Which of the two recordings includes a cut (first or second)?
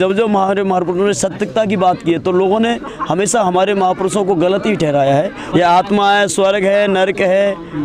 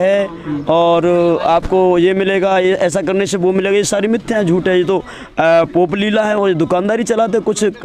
first